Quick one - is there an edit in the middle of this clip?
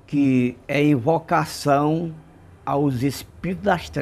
no; 0 cuts

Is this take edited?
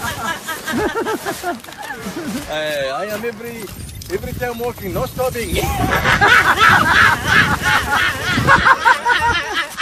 no; 0 cuts

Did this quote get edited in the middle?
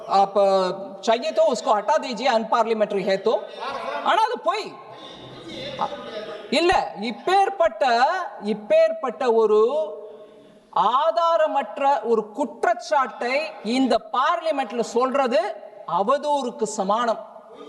no; 0 cuts

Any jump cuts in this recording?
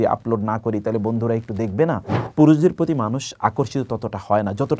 yes; 1 cut; at 2.2 s

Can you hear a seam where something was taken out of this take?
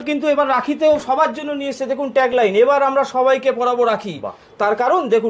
no; 0 cuts

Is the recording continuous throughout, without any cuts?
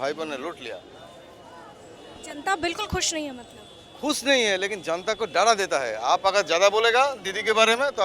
yes; 0 cuts

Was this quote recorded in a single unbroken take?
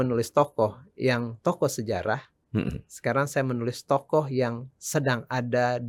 yes; 0 cuts

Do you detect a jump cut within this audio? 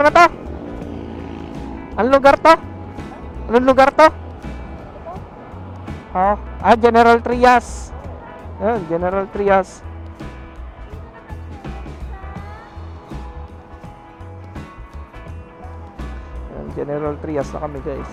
no; 0 cuts

